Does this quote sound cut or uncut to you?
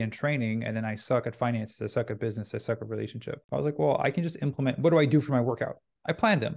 cut